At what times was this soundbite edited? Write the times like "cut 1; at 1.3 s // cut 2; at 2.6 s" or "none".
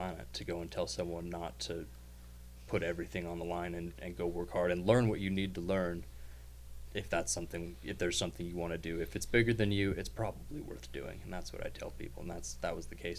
none